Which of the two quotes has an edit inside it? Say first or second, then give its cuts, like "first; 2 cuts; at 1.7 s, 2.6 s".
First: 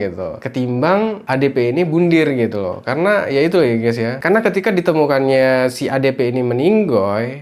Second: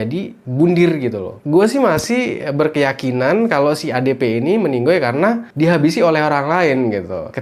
second; 1 cut; at 1.4 s